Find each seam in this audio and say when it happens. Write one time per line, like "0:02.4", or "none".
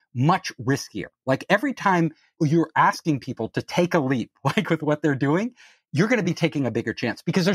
0:02.2
0:05.8